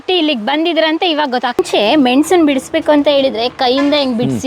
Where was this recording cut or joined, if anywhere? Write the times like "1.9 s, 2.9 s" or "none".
1.6 s